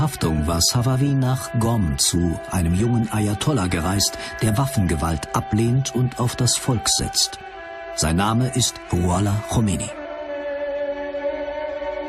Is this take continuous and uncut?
yes; 0 cuts

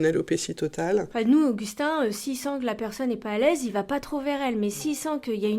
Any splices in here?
yes; 1 cut; at 1.1 s

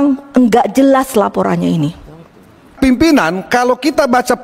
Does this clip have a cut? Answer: yes; 1 cut; at 2.7 s

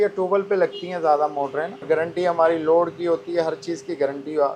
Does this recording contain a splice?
yes; 1 cut; at 1.8 s

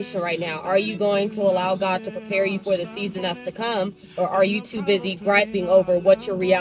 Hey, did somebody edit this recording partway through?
no; 0 cuts

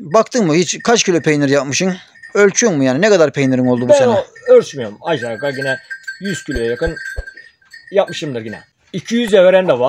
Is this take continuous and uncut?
no; 1 cut; at 8.6 s

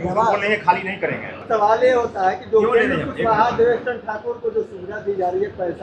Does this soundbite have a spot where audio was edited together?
yes; 1 cut; at 1.4 s

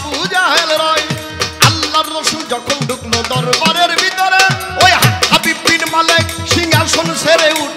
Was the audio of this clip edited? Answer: no; 0 cuts

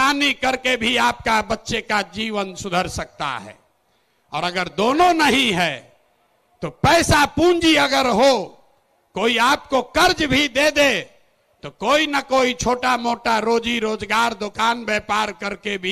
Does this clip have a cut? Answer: no; 0 cuts

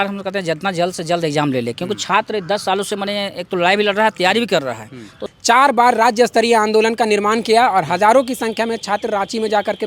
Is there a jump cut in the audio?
yes; 1 cut; at 5.2 s

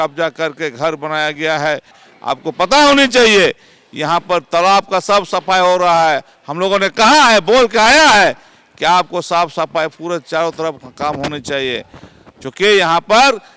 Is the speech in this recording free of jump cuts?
no; 1 cut; at 2.1 s

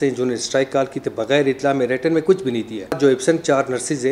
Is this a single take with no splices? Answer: no; 1 cut; at 3.0 s

